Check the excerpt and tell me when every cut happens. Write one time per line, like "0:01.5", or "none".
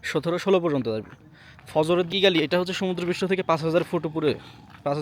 0:02.1